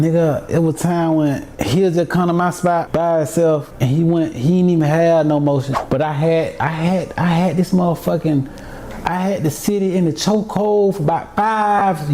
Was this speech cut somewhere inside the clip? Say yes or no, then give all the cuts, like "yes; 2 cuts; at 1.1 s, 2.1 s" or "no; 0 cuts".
yes; 4 cuts; at 1.5 s, 2.9 s, 3.7 s, 5.7 s